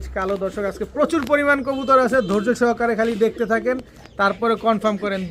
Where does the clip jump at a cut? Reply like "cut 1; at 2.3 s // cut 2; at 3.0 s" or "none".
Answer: none